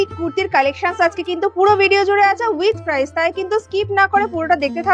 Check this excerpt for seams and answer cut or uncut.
uncut